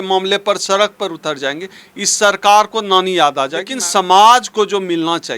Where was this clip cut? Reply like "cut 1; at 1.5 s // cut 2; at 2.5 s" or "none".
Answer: cut 1; at 3.7 s